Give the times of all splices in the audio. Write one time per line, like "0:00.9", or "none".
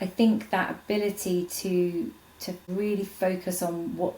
none

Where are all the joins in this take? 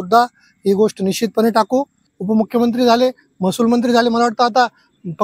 0:02.1

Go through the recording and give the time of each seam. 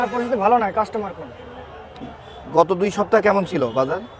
none

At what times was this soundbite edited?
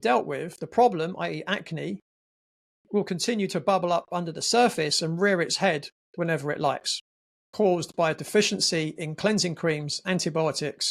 0:07.5

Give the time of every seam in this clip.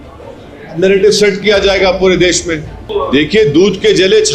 0:02.8

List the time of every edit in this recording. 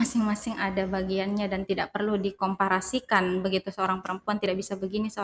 none

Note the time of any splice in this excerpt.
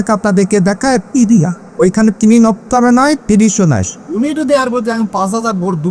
0:01.6
0:04.0

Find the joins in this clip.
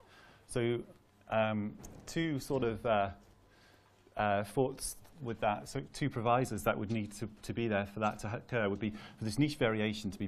0:06.8

